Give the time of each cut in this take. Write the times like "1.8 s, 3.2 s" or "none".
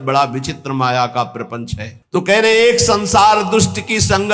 none